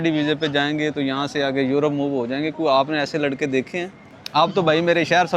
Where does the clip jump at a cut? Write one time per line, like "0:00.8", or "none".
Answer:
0:04.1